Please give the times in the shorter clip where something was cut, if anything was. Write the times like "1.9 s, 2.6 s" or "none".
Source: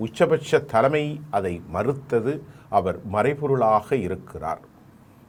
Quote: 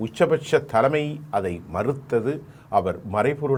none